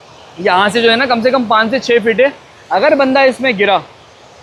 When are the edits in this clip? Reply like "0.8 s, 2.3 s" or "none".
none